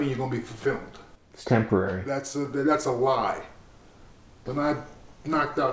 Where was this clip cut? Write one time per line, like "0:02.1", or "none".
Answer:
0:04.5